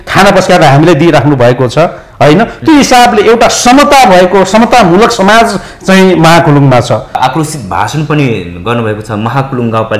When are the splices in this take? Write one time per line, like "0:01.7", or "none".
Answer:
0:07.2